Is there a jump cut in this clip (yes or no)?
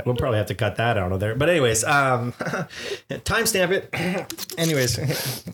no